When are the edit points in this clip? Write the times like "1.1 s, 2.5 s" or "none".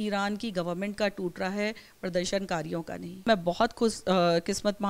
3.3 s